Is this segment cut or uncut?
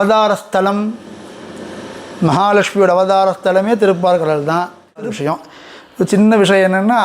cut